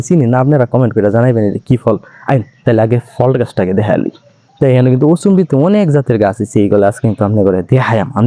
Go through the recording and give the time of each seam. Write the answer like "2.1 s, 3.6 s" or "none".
4.4 s